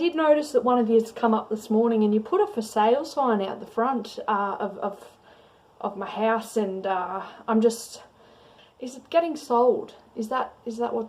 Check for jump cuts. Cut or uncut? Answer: uncut